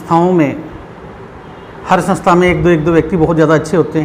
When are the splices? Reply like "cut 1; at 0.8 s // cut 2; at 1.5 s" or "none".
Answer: none